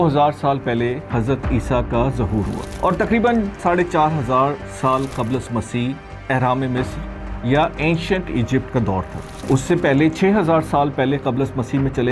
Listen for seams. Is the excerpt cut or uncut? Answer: cut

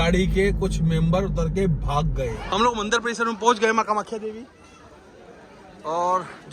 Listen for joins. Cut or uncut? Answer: cut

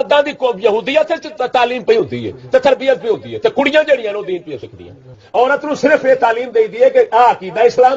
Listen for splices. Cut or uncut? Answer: cut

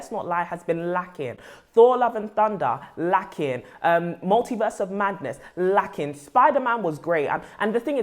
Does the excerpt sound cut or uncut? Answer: uncut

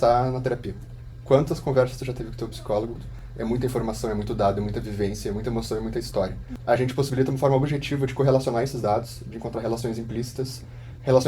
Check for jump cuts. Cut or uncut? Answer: cut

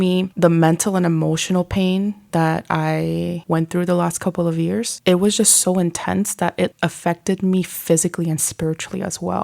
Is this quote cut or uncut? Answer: cut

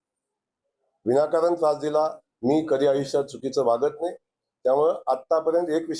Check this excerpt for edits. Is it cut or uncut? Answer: cut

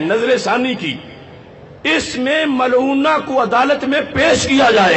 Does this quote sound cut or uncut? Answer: uncut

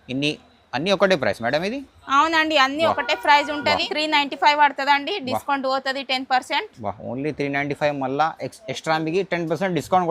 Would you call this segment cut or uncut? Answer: cut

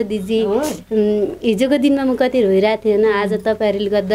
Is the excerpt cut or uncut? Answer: uncut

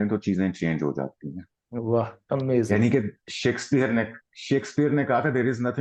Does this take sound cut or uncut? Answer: uncut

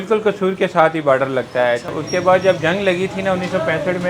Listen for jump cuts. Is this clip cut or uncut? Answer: cut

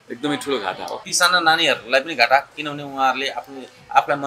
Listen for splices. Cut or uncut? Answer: cut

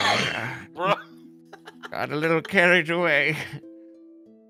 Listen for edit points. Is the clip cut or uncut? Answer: uncut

